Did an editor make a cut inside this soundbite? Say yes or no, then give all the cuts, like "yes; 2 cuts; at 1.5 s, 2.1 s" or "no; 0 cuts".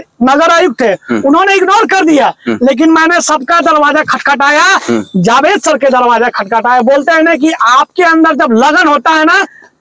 no; 0 cuts